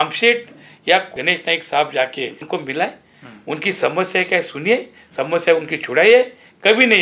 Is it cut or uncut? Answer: cut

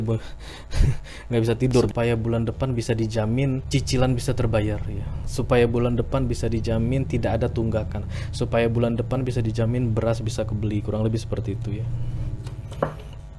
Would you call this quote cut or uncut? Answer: cut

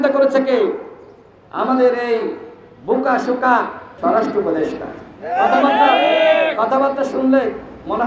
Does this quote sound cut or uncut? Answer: cut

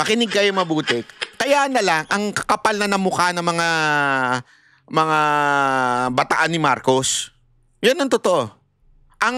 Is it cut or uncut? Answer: uncut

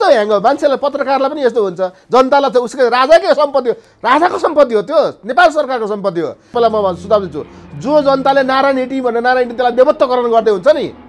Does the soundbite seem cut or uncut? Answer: cut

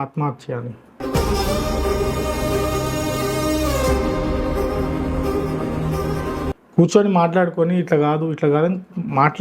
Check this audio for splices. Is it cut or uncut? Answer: cut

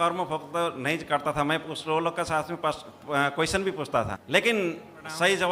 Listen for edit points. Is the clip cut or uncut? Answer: cut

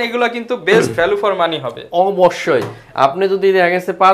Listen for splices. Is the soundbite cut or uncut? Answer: uncut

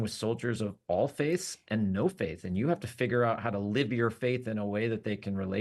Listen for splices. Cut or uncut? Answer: uncut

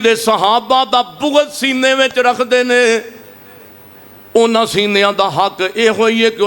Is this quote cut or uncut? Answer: uncut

